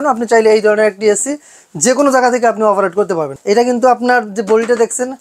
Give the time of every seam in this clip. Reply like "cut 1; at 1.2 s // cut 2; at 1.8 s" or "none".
cut 1; at 3.3 s